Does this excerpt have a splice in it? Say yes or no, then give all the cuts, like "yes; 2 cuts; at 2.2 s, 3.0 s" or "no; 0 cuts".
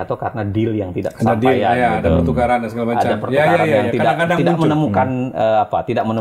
no; 0 cuts